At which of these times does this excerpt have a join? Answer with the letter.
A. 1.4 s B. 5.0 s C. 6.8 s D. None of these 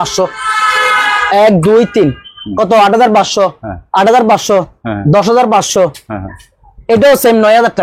D